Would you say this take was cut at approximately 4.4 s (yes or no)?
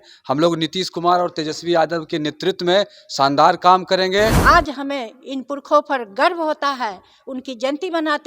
yes